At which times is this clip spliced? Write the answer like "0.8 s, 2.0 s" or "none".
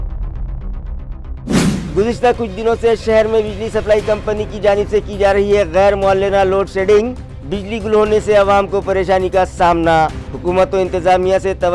1.8 s

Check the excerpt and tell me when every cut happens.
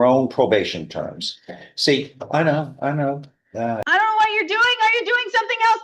3.8 s

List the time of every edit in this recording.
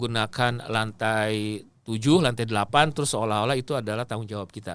none

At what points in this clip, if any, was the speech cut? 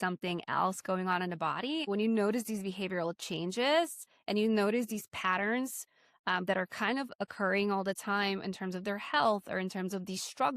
1.8 s

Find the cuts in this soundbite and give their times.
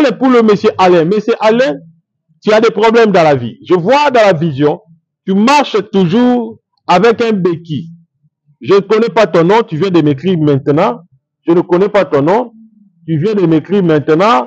none

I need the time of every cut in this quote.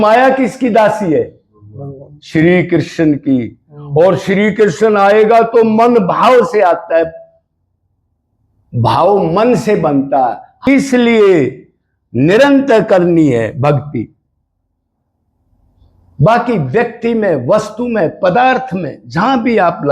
10.7 s

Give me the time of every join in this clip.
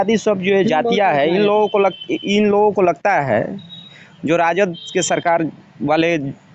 none

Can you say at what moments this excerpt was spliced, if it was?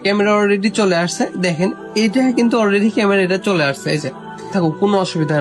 4.5 s

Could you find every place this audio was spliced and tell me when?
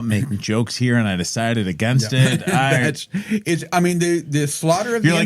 none

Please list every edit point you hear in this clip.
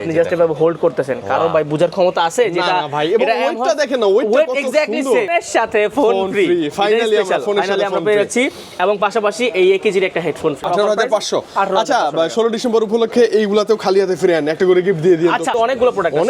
5.3 s, 10.6 s, 15.5 s

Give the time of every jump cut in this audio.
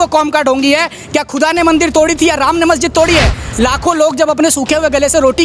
3.4 s

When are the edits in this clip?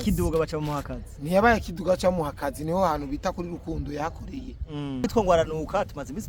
5.1 s

